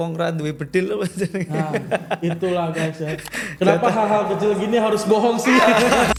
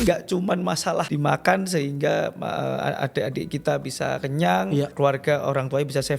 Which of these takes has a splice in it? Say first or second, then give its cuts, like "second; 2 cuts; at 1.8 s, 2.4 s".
second; 2 cuts; at 1.1 s, 4.9 s